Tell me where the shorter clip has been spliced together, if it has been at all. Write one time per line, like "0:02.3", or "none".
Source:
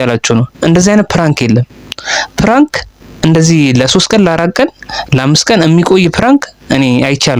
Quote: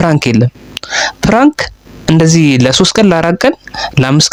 none